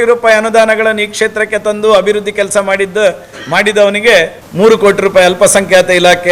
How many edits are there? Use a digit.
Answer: 1